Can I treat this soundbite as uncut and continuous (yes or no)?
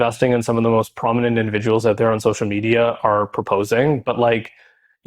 yes